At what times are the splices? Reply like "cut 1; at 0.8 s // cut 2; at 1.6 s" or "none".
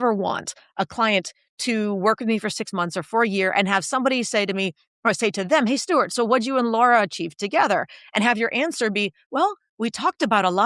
none